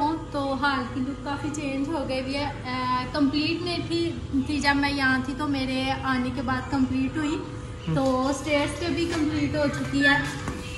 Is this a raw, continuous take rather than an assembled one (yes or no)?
yes